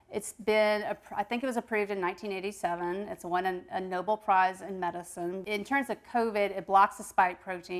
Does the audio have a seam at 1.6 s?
no; 1 cut; at 5.4 s

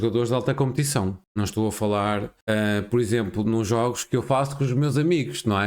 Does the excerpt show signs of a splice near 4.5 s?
no; 2 cuts; at 1.2 s, 2.3 s

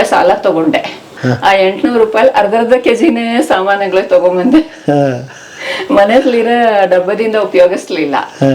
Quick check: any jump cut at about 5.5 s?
no; 1 cut; at 1.2 s

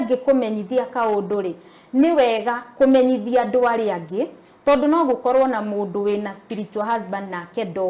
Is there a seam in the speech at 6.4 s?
no; 0 cuts

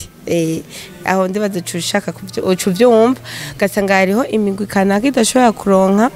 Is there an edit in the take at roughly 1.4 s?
no; 0 cuts

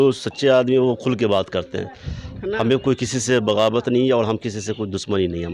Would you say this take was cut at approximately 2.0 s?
no; 0 cuts

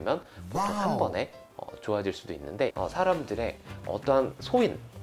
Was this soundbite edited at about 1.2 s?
no; 1 cut; at 2.7 s

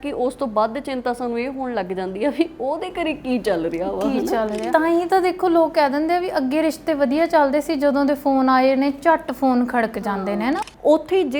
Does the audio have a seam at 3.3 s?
no; 2 cuts; at 4.7 s, 10.6 s

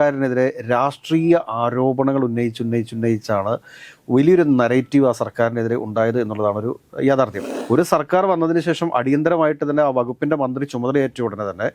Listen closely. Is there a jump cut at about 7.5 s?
yes; 1 cut; at 7.5 s

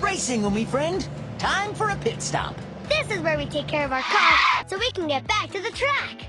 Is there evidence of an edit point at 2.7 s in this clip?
yes; 1 cut; at 2.7 s

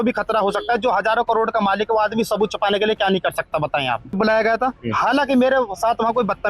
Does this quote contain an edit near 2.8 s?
no; 1 cut; at 4.2 s

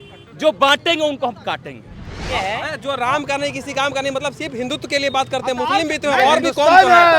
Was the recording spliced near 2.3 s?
yes; 1 cut; at 2.3 s

